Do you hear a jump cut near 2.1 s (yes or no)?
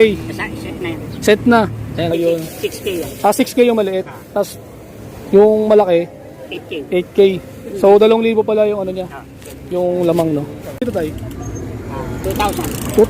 yes